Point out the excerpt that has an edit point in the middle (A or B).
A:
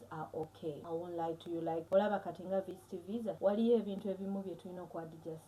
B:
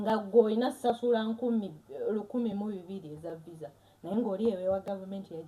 A